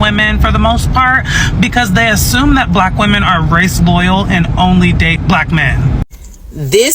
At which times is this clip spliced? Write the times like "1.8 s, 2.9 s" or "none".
6.0 s